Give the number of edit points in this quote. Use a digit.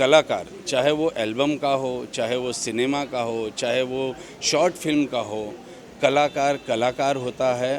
0